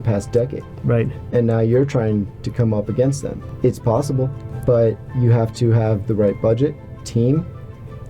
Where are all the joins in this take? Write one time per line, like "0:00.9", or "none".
0:03.4
0:04.5
0:07.0